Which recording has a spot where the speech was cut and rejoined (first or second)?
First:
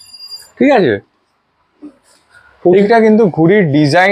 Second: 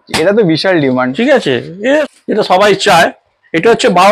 second